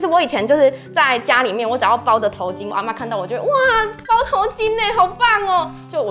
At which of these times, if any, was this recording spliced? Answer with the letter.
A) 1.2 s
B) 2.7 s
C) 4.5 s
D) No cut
B